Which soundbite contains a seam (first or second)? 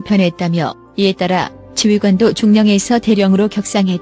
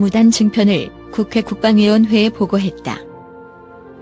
second